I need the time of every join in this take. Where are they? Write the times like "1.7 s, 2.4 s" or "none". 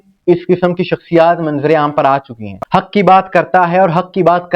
2.6 s